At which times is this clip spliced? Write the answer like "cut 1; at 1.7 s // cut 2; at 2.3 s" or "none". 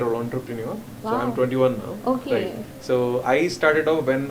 none